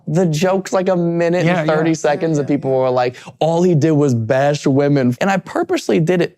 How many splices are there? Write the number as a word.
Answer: one